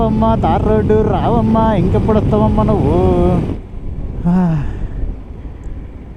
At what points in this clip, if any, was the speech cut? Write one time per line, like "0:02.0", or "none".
0:03.5